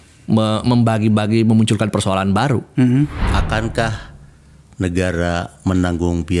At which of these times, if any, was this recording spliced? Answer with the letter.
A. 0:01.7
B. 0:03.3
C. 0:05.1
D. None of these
B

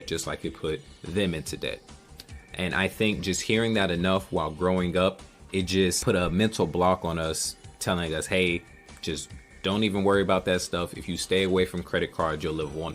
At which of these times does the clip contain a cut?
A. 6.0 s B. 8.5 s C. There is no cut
A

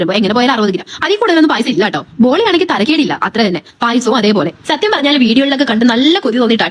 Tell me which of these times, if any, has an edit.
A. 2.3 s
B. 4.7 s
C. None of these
C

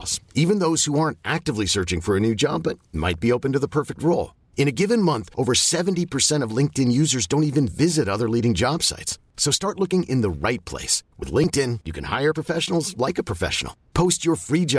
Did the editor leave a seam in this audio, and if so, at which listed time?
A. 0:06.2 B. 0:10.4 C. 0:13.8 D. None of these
D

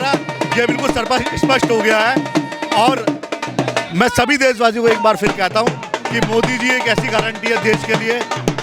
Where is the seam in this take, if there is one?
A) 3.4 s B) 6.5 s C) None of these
C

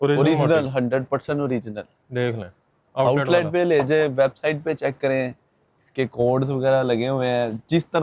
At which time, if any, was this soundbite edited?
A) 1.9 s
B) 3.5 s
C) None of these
C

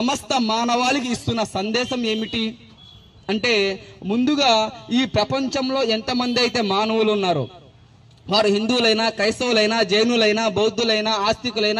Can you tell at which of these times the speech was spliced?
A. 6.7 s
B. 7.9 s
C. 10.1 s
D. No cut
D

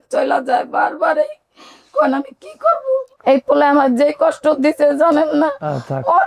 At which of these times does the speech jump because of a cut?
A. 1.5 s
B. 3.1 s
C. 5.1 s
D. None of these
B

